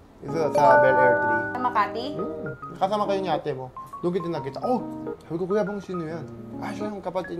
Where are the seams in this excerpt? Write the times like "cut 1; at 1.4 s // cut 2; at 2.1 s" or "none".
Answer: cut 1; at 1.5 s